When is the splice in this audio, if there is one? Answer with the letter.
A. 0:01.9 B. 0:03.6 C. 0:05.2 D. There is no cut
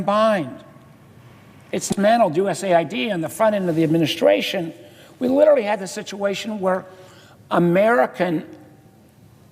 A